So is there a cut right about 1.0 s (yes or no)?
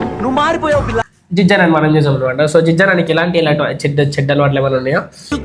yes